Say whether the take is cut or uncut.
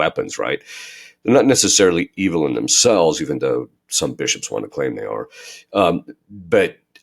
uncut